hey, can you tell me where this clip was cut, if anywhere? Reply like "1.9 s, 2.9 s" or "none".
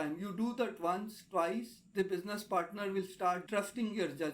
3.4 s